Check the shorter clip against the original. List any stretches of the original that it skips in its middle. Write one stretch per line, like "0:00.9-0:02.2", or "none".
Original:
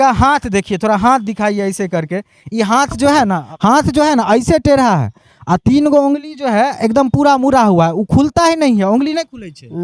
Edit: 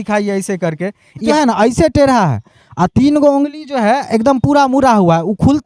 0:02.6-0:04.0